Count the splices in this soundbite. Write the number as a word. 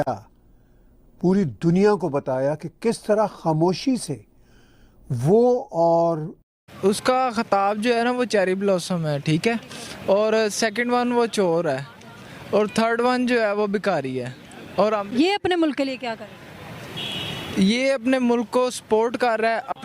one